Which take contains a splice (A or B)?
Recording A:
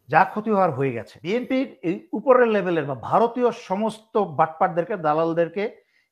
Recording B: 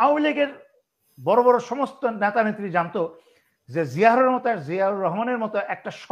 A